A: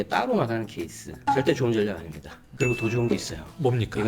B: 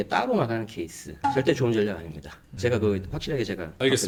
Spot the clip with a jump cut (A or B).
A